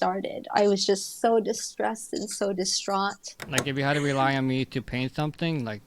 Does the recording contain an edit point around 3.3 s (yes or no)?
yes